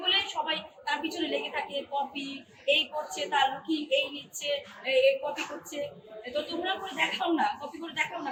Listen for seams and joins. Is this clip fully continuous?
yes; 0 cuts

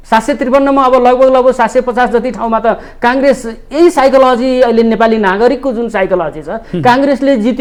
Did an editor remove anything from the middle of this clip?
no; 0 cuts

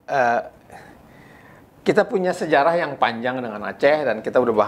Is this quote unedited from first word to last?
yes; 0 cuts

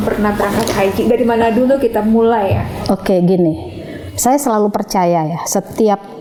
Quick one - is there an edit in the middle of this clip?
no; 0 cuts

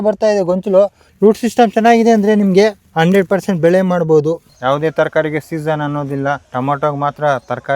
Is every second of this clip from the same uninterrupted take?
no; 4 cuts; at 1.0 s, 2.8 s, 4.5 s, 6.5 s

